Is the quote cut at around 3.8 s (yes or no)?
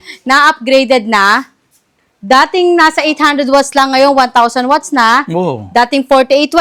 no